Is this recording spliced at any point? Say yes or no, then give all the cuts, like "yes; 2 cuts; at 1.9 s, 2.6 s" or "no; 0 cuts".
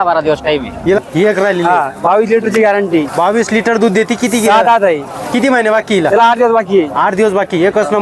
yes; 1 cut; at 1.0 s